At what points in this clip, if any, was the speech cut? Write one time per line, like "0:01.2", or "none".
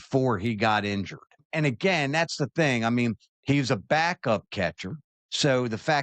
0:01.5